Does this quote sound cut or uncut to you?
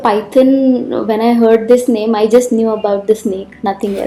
uncut